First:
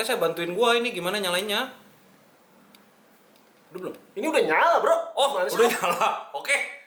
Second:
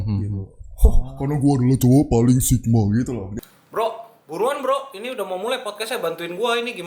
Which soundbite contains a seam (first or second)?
second